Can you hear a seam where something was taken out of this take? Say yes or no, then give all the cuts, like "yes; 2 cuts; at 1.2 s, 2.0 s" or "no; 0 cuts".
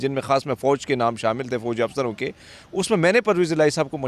no; 0 cuts